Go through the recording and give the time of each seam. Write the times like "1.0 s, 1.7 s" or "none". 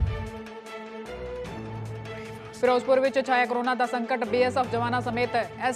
1.3 s, 2.0 s